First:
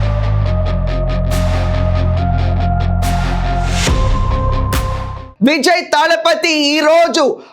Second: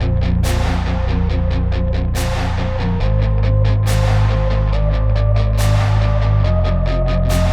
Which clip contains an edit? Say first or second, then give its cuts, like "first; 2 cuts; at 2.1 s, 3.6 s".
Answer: first; 1 cut; at 4.9 s